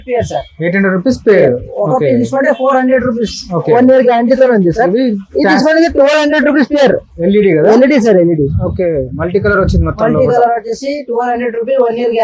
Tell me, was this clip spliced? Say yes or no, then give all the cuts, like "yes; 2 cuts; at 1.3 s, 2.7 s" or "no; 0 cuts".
no; 0 cuts